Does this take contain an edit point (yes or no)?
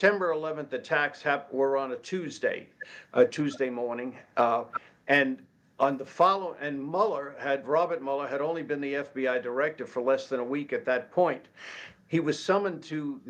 no